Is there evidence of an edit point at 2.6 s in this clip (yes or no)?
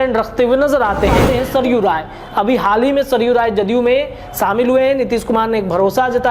no